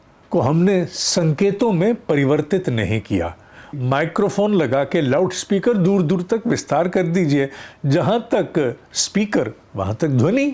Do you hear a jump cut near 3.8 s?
yes; 1 cut; at 3.8 s

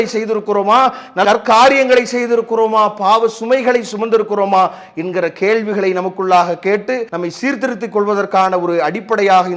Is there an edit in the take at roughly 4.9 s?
no; 1 cut; at 7.1 s

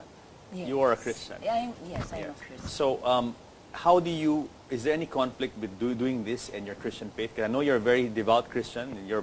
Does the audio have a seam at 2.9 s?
yes; 1 cut; at 2.9 s

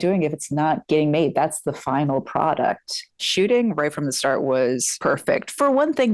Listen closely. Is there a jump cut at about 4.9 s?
yes; 2 cuts; at 3.2 s, 4.9 s

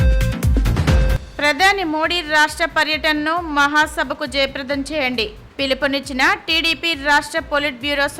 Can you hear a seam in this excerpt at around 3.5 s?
no; 1 cut; at 0.9 s

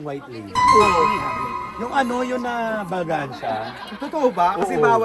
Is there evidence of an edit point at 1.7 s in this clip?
no; 0 cuts

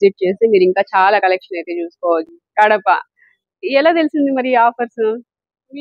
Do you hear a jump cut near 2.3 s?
yes; 1 cut; at 2.3 s

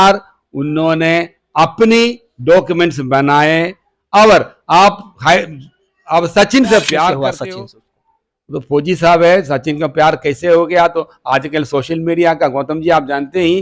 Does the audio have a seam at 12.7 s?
no; 1 cut; at 7.3 s

